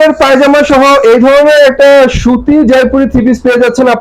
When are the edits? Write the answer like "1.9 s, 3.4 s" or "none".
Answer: none